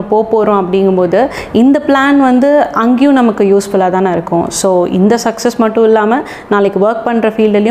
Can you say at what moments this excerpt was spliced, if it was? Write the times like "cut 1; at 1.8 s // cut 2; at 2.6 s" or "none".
none